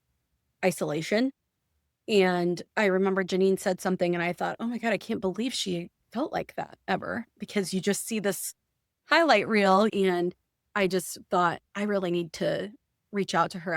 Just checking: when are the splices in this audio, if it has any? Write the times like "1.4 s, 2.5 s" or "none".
9.9 s